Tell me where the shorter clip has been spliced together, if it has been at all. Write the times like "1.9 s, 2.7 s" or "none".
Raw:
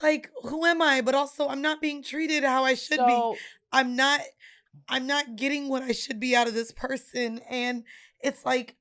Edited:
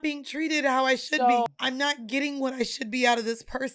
1.5 s